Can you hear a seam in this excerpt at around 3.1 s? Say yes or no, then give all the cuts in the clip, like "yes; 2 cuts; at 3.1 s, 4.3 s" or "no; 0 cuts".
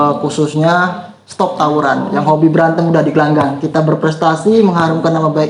no; 0 cuts